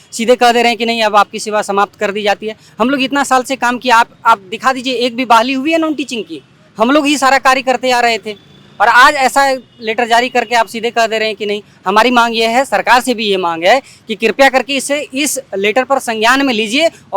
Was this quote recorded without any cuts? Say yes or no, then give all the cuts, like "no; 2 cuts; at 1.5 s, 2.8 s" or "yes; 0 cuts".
yes; 0 cuts